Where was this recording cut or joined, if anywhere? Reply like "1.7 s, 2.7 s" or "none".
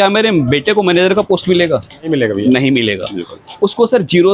2.1 s